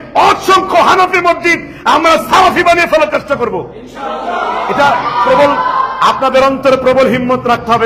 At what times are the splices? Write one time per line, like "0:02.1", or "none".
none